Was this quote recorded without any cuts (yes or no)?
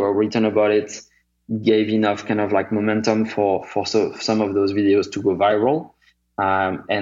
yes